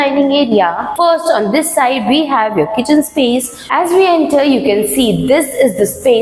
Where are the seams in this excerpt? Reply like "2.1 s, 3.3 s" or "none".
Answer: 0.8 s, 3.6 s